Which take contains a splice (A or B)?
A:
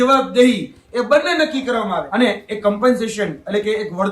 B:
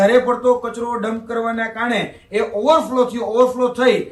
A